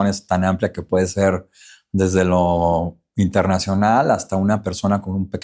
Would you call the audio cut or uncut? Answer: uncut